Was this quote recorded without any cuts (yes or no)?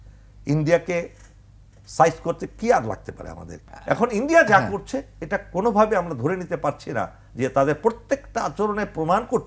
no